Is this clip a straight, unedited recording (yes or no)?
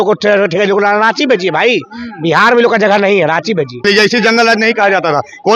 no